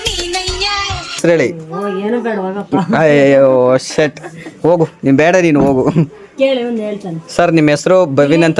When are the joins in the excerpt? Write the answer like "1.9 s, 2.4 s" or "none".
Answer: none